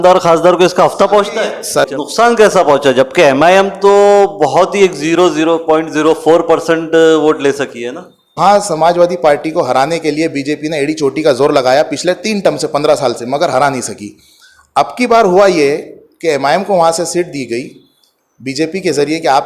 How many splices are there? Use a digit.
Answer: 2